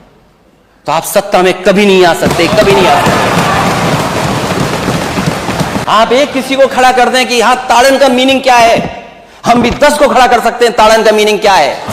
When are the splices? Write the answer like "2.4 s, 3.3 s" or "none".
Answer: 5.8 s